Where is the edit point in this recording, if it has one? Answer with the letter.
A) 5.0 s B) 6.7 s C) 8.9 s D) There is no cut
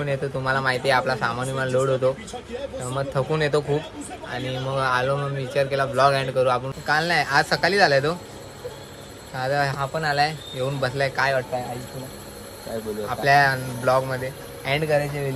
B